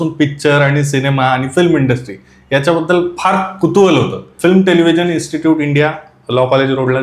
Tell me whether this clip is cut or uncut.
cut